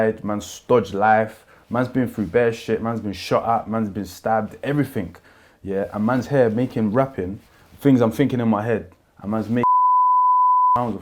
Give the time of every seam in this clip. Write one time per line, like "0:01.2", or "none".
none